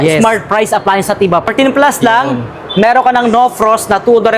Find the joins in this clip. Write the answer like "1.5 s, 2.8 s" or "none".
1.5 s